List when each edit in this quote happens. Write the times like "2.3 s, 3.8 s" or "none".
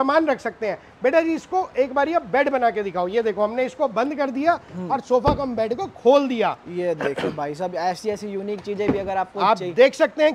none